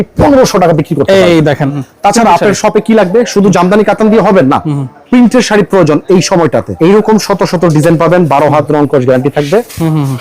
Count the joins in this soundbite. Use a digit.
2